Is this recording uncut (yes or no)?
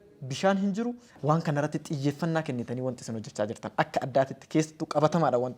no